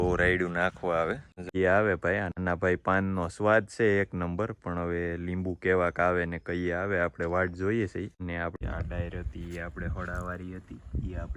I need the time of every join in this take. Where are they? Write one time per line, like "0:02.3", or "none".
0:01.5
0:08.5